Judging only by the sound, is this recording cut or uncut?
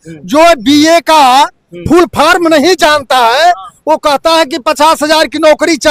uncut